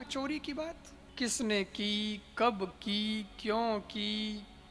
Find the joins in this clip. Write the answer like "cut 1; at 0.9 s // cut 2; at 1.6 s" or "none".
cut 1; at 1.0 s

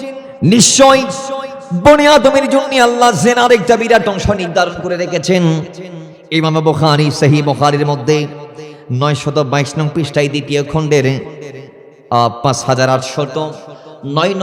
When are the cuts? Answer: none

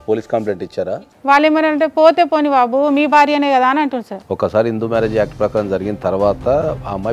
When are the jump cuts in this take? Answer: cut 1; at 0.9 s // cut 2; at 4.1 s

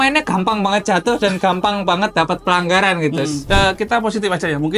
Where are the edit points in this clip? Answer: cut 1; at 3.4 s

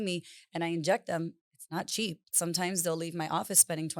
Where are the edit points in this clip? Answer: cut 1; at 2.4 s

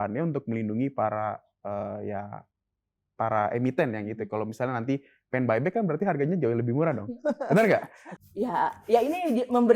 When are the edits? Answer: cut 1; at 8.0 s

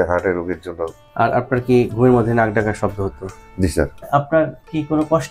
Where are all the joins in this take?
cut 1; at 1.0 s // cut 2; at 4.1 s

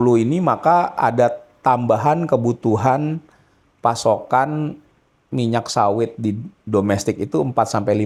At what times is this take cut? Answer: none

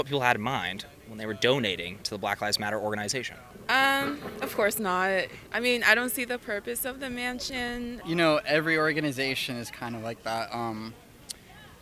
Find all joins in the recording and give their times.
cut 1; at 3.5 s // cut 2; at 5.4 s // cut 3; at 8.0 s

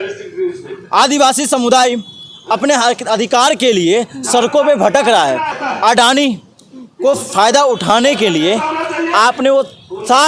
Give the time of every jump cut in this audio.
cut 1; at 5.5 s

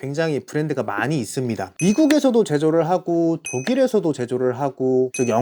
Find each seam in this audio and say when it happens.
cut 1; at 1.7 s

